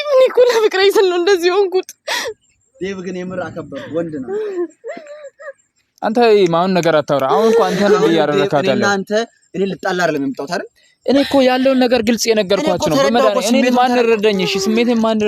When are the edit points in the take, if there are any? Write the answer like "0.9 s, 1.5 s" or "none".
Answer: none